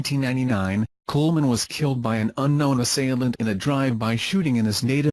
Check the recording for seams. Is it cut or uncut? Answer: uncut